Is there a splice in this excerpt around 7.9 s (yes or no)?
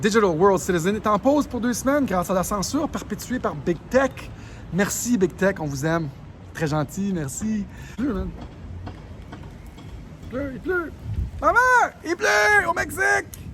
yes